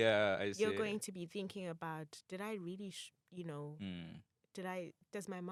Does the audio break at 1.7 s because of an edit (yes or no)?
no